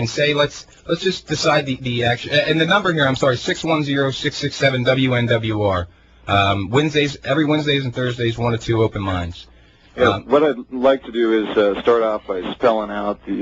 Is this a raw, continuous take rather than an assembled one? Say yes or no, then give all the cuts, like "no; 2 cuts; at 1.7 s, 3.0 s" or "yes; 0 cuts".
yes; 0 cuts